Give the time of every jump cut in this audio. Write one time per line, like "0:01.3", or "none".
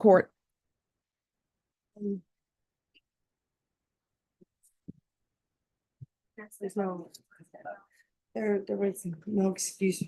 none

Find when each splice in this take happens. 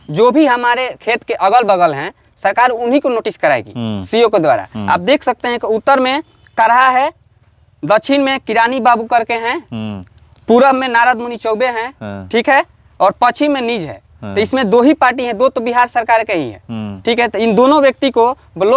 none

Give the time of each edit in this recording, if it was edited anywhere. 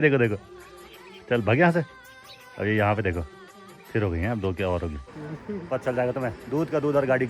0:05.1

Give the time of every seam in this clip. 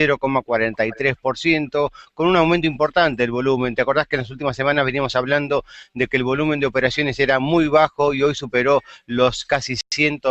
none

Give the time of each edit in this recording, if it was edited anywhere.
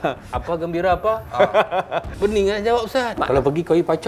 0:02.0
0:03.2

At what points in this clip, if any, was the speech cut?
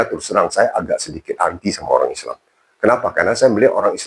none

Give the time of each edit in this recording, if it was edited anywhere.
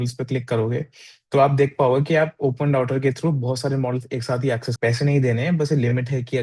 0:04.7

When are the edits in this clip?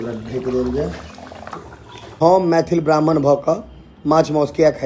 0:02.2

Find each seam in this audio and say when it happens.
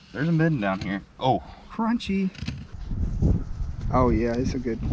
0:02.7

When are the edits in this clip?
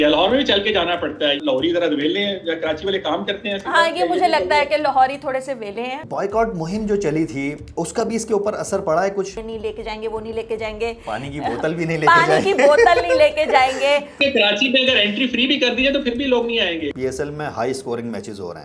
0:01.4
0:06.0
0:09.3
0:14.2
0:16.9

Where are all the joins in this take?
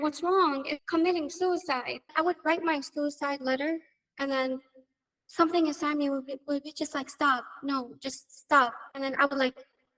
0:02.1

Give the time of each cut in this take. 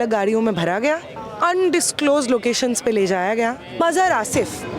0:01.2
0:03.8

